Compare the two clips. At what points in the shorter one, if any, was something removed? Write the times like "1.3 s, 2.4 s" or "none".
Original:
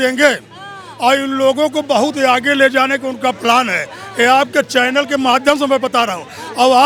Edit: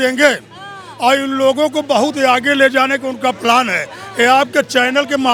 none